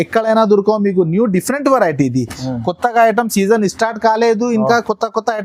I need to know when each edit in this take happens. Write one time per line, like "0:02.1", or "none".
none

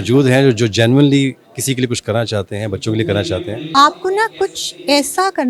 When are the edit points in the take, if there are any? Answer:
0:03.7

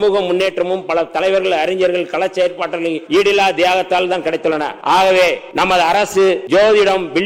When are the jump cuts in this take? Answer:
0:03.0
0:04.7
0:05.4
0:06.4

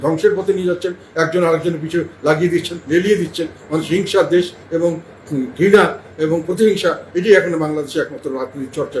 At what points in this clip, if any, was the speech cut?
none

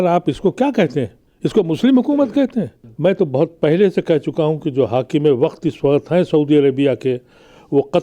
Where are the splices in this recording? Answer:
0:01.2
0:02.8

